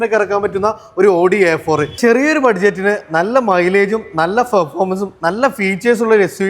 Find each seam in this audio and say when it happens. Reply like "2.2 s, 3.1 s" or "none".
2.0 s